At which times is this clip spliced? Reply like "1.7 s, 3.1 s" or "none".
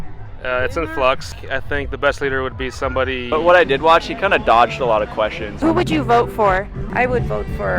1.4 s, 3.2 s, 5.5 s, 6.9 s

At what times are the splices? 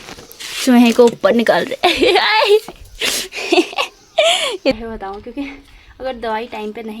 4.7 s

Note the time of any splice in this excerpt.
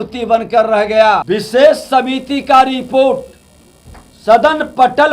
1.2 s

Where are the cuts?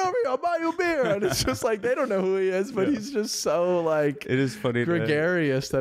none

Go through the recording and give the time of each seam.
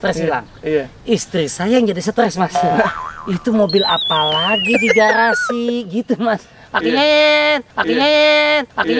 none

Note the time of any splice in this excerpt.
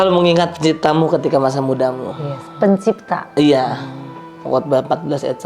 none

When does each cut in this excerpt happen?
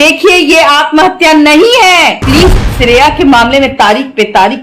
2.2 s

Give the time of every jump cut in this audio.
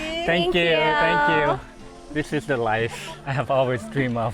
1.7 s, 3.2 s

